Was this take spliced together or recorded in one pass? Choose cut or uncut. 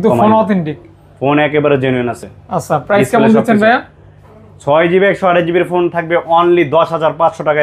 uncut